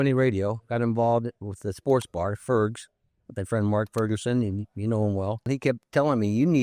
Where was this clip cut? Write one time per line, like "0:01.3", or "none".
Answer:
0:05.5